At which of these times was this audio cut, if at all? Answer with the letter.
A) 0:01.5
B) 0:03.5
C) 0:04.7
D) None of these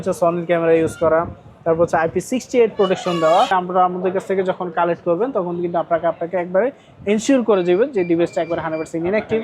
B